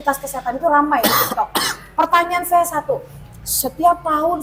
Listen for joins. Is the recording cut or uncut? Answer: uncut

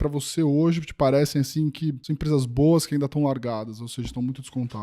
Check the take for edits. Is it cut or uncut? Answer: cut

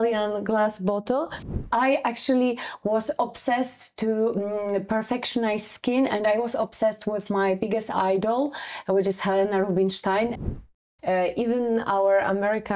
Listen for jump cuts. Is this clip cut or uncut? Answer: cut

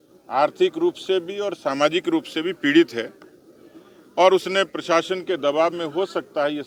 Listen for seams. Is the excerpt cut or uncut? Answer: uncut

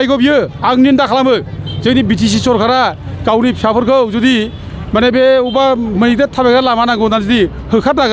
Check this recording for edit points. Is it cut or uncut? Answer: uncut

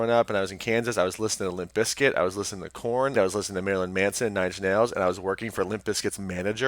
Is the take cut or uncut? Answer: cut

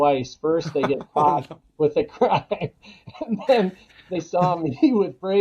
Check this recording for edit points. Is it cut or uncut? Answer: uncut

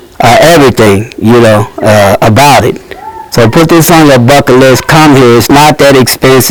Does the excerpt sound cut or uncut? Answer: uncut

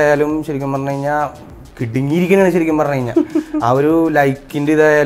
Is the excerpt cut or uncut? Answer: uncut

